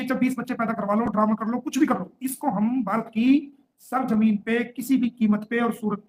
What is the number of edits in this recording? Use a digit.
0